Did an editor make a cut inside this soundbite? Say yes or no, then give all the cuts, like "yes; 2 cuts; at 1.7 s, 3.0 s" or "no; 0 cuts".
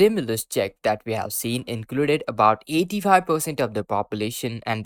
no; 0 cuts